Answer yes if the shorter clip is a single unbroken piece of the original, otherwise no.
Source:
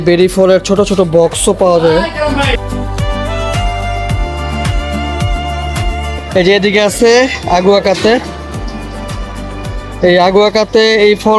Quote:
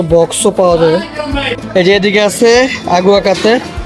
no